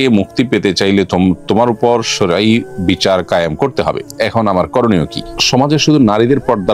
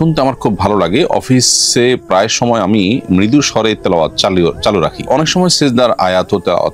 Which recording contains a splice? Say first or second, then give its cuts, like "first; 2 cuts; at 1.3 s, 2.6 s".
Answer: first; 2 cuts; at 4.1 s, 5.2 s